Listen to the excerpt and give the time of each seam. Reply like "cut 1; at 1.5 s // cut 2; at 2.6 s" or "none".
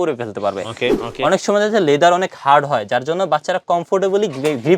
cut 1; at 1.0 s